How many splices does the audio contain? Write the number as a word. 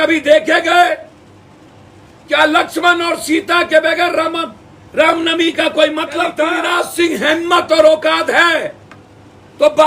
one